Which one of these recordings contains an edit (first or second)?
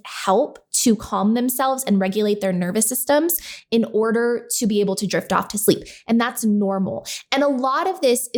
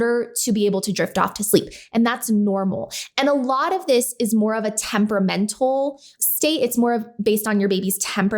second